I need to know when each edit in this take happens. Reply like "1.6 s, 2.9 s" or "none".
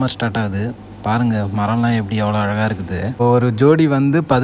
3.2 s